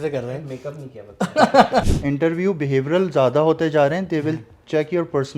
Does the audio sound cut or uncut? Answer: cut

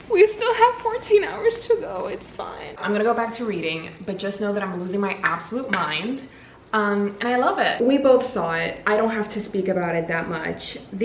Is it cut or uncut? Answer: cut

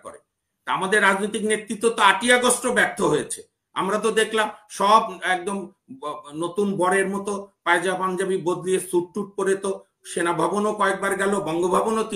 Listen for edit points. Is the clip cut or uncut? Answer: uncut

